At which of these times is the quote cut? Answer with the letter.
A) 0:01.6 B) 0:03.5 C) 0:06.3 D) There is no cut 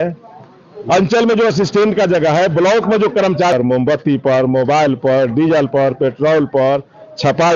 B